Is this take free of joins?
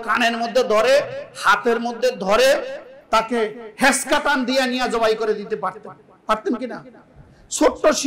yes; 0 cuts

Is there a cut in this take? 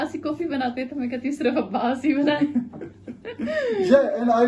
no; 0 cuts

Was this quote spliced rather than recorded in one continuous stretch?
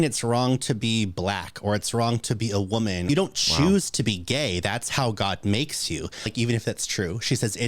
yes; 2 cuts; at 3.0 s, 6.3 s

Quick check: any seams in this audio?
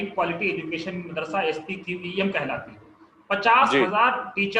no; 0 cuts

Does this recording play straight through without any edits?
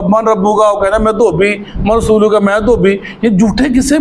yes; 0 cuts

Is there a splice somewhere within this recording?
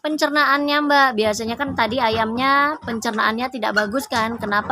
no; 0 cuts

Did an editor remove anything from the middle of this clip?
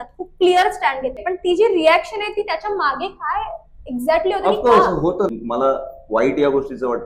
yes; 2 cuts; at 1.2 s, 5.3 s

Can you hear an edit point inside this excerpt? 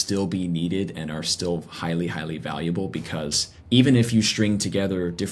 yes; 1 cut; at 3.5 s

